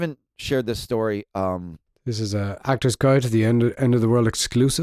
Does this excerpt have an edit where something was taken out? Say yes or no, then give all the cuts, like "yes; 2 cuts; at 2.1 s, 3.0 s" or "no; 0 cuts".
no; 0 cuts